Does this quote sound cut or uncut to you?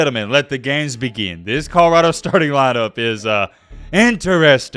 uncut